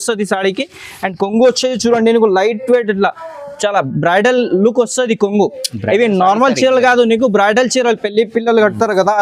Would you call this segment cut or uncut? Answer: uncut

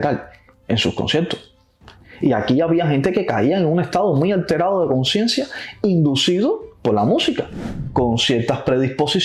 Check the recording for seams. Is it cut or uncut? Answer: cut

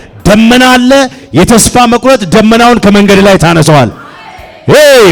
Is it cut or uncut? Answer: uncut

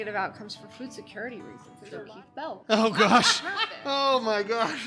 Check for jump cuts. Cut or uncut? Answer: cut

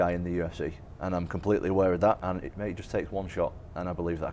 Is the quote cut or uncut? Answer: cut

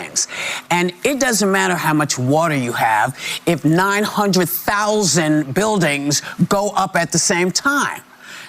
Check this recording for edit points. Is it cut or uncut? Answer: cut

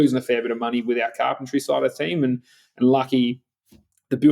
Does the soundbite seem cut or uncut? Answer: uncut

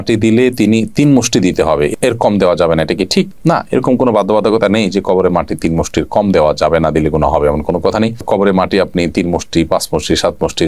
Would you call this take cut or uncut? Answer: uncut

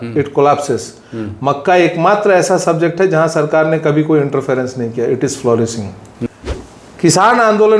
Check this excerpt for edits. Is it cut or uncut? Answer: cut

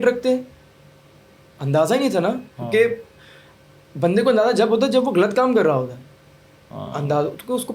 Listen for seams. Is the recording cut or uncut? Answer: uncut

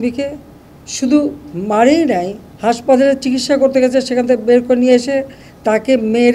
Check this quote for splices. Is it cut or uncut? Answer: uncut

